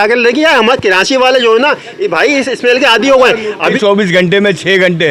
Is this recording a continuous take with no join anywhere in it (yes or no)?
no